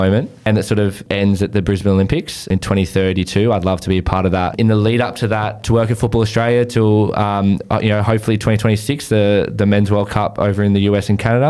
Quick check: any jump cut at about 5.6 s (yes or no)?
yes